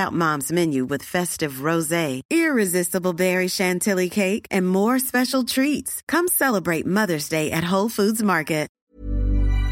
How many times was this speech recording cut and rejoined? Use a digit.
1